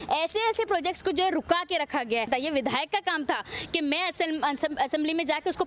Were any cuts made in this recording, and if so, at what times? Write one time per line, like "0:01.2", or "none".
none